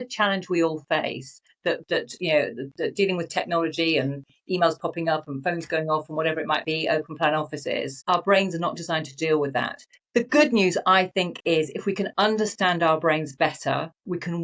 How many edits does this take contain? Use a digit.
0